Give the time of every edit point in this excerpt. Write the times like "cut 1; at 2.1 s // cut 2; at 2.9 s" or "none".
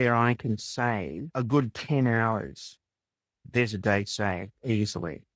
cut 1; at 1.2 s // cut 2; at 3.7 s